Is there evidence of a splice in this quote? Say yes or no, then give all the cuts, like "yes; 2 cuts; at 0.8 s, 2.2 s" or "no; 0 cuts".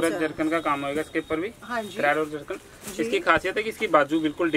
no; 0 cuts